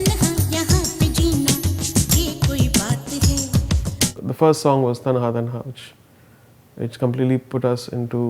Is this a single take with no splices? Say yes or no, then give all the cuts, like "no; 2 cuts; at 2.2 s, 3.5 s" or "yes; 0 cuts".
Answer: yes; 0 cuts